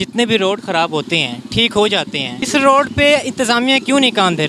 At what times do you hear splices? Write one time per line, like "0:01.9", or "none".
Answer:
0:02.4